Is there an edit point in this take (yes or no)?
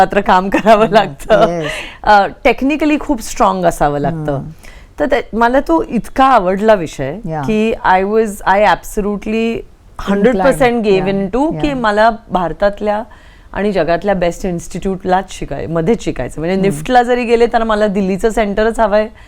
no